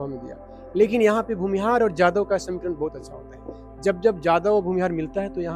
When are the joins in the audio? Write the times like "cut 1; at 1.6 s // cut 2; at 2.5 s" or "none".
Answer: none